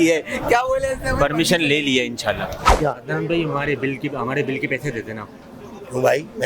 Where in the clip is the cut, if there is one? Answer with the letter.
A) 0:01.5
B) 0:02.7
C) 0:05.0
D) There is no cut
B